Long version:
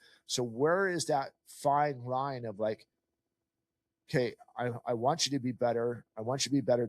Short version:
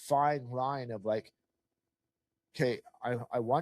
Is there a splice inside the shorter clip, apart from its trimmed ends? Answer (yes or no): no